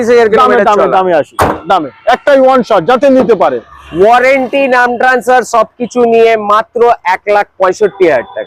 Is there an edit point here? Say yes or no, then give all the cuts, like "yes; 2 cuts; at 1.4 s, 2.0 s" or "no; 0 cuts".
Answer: no; 0 cuts